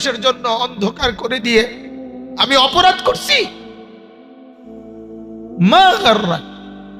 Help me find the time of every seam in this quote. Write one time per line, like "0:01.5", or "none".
none

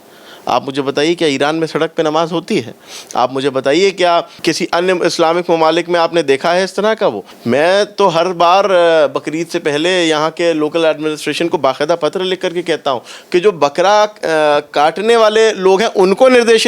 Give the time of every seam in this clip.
0:04.3
0:07.3

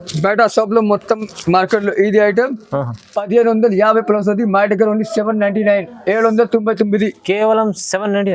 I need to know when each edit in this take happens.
none

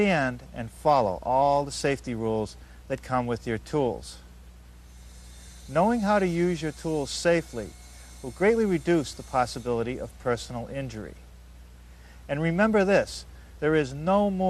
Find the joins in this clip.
none

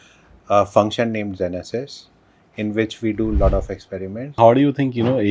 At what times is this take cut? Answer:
0:04.4

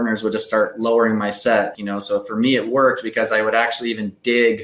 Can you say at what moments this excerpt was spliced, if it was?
0:01.8

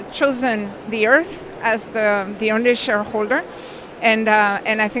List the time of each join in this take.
none

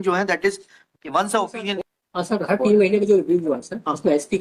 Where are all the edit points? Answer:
0:01.8

